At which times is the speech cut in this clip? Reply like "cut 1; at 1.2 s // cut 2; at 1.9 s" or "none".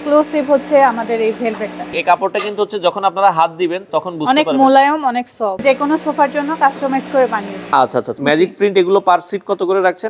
cut 1; at 1.8 s // cut 2; at 5.6 s // cut 3; at 8.1 s